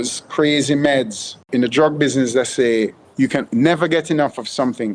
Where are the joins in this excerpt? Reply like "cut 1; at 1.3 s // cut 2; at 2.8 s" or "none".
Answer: cut 1; at 1.4 s // cut 2; at 3.3 s